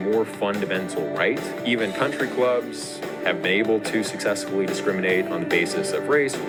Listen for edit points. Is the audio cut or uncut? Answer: uncut